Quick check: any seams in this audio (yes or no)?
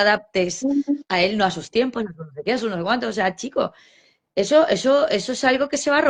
no